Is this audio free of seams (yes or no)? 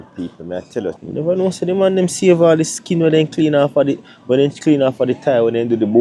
no